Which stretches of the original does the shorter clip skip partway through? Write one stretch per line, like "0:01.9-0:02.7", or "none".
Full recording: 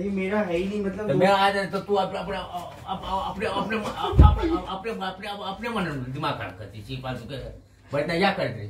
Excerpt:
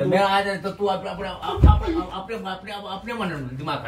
0:02.5-0:03.9